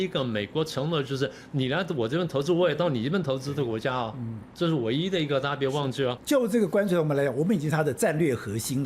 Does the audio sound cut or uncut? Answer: cut